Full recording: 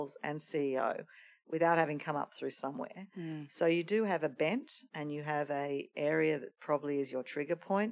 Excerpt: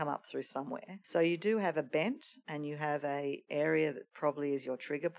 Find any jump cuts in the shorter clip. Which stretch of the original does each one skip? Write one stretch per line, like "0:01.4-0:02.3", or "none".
0:03.0-0:03.4